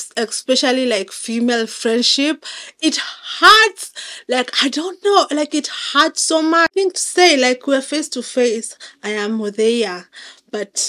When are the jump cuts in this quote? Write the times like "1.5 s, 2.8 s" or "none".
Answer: 6.7 s

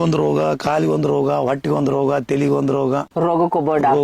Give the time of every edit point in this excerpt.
3.1 s

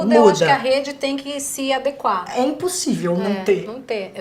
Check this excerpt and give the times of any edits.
none

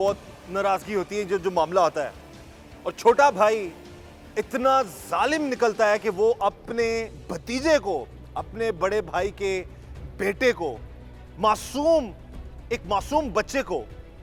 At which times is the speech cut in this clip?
none

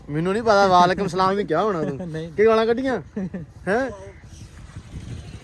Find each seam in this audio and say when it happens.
none

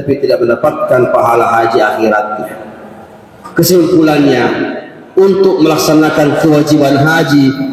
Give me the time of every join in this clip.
3.3 s

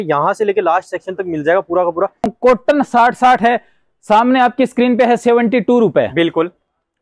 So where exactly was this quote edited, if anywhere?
2.3 s

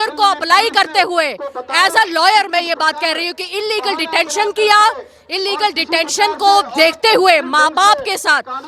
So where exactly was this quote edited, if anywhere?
none

